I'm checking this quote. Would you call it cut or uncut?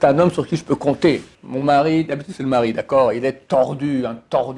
cut